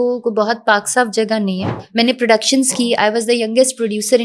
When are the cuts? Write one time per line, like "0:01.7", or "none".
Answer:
0:01.7